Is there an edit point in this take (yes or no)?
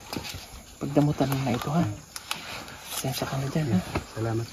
no